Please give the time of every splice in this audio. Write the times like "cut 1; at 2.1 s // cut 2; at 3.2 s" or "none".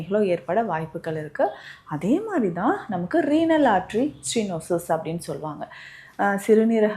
none